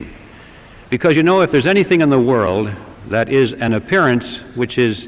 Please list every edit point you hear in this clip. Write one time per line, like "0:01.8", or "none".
0:01.3